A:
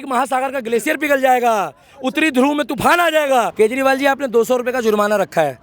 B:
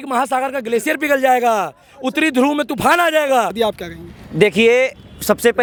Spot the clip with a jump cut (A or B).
A